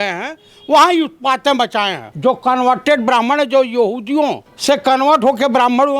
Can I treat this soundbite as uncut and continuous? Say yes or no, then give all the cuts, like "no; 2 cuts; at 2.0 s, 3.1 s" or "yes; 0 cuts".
no; 2 cuts; at 2.0 s, 4.5 s